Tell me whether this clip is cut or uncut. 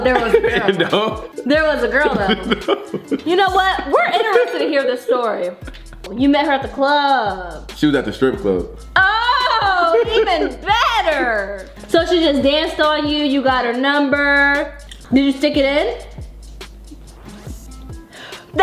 cut